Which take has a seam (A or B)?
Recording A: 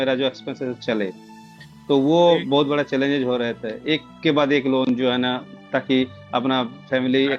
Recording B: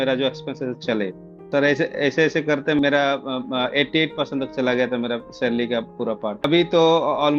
B